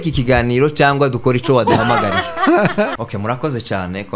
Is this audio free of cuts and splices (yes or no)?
no